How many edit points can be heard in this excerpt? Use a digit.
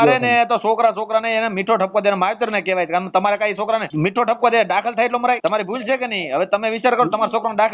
2